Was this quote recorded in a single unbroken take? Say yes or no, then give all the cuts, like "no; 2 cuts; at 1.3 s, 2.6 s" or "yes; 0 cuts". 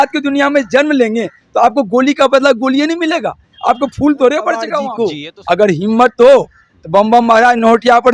no; 1 cut; at 4.8 s